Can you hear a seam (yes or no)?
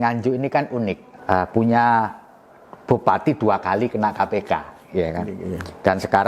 yes